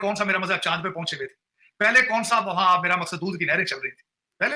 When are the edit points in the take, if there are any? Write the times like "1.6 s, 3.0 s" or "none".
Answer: none